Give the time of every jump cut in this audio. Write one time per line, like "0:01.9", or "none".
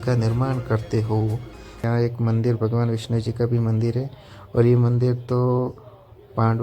0:01.8